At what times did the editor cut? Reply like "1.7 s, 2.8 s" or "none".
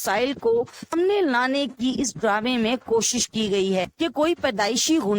0.9 s, 3.9 s